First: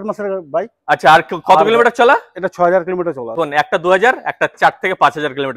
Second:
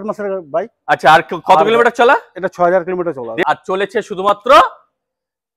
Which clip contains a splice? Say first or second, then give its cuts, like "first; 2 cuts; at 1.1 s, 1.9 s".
first; 1 cut; at 3.3 s